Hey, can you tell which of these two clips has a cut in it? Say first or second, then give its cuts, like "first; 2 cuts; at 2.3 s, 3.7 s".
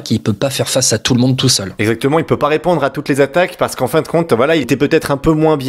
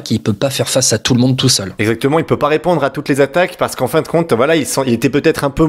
first; 1 cut; at 4.7 s